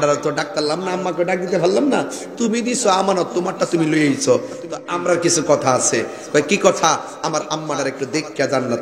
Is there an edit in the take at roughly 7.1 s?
no; 1 cut; at 4.5 s

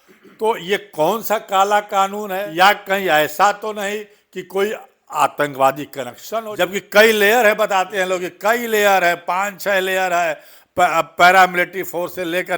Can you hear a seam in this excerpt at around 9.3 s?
no; 2 cuts; at 2.4 s, 6.5 s

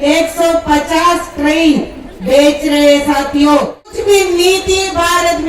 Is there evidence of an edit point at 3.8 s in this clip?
yes; 1 cut; at 3.8 s

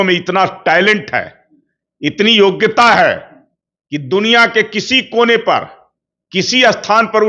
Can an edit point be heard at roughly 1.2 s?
no; 0 cuts

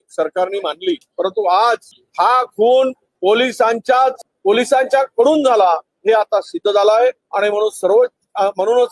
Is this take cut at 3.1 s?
yes; 6 cuts; at 1.1 s, 2.0 s, 3.1 s, 4.3 s, 5.9 s, 7.2 s

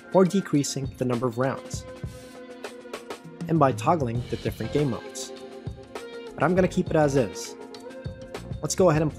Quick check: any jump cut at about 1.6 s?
no; 0 cuts

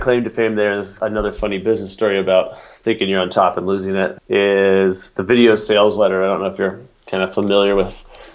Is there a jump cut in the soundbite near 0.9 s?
yes; 2 cuts; at 0.9 s, 4.2 s

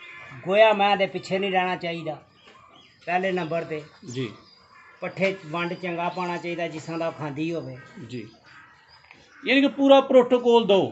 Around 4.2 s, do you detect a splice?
no; 0 cuts

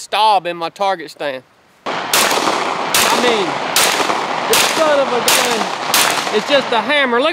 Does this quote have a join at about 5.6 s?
no; 1 cut; at 1.8 s

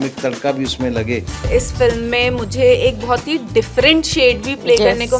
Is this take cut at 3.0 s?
no; 1 cut; at 1.5 s

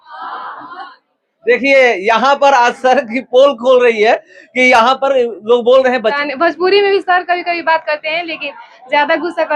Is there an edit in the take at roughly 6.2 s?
yes; 1 cut; at 6.2 s

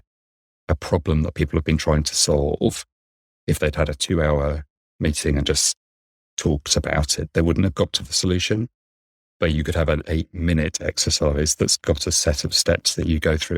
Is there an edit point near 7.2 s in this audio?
yes; 1 cut; at 7.2 s

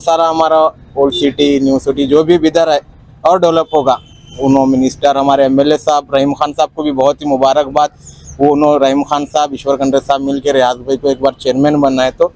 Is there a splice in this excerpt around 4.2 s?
no; 0 cuts

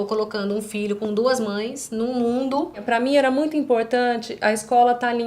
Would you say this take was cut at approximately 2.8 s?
yes; 1 cut; at 2.8 s

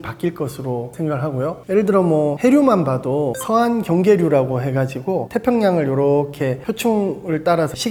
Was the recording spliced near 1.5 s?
no; 0 cuts

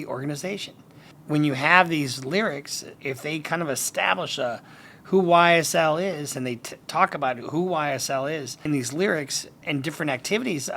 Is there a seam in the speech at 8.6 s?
yes; 3 cuts; at 2.9 s, 8.6 s, 9.6 s

